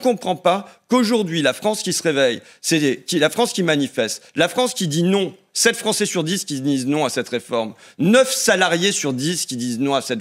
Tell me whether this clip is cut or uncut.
uncut